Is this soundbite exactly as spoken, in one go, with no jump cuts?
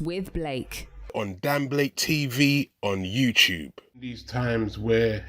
no; 1 cut; at 3.6 s

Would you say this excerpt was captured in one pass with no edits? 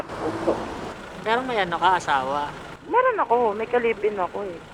no; 1 cut; at 1.0 s

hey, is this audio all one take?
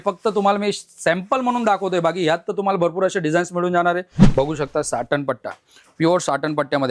no; 1 cut; at 4.2 s

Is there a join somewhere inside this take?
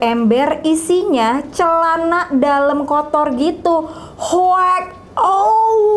no; 0 cuts

